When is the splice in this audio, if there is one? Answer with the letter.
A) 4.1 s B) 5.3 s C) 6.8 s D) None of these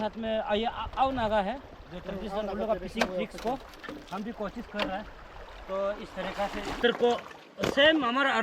C